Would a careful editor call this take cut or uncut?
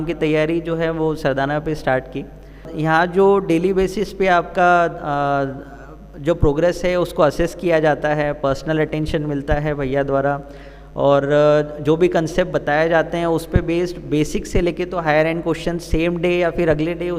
cut